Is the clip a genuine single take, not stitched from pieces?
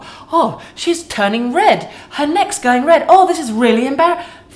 yes; 0 cuts

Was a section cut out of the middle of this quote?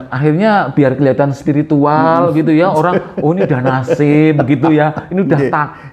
no; 0 cuts

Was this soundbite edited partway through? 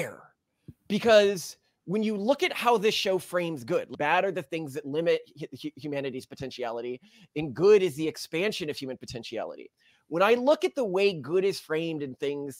yes; 1 cut; at 3.9 s

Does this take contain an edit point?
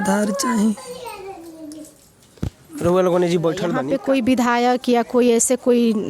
yes; 1 cut; at 3.8 s

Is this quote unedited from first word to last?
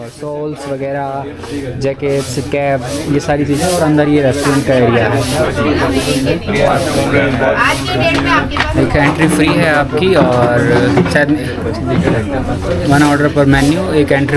yes; 0 cuts

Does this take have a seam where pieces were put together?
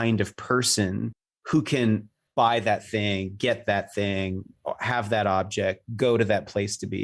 yes; 1 cut; at 2.2 s

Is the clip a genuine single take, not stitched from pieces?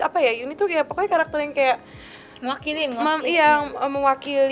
yes; 0 cuts

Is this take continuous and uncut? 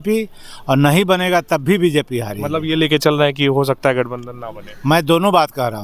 yes; 0 cuts

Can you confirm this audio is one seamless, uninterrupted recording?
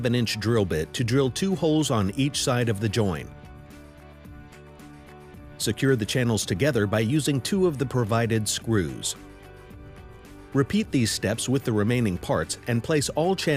yes; 0 cuts

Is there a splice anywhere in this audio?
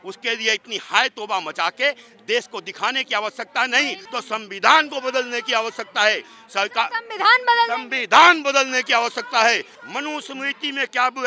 yes; 2 cuts; at 4.0 s, 9.7 s

